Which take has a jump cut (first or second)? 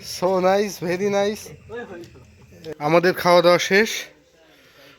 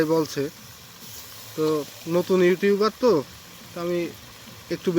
first